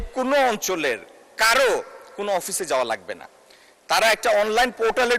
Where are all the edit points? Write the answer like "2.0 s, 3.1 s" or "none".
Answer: none